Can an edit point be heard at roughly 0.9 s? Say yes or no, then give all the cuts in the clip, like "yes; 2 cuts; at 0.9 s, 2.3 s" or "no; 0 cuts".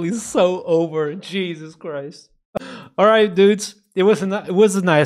no; 1 cut; at 2.6 s